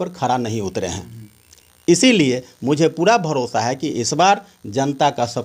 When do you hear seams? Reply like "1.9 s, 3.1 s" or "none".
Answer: none